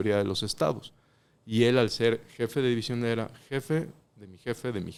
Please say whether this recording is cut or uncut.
uncut